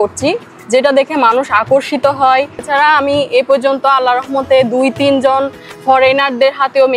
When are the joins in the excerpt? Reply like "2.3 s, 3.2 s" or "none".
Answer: 2.7 s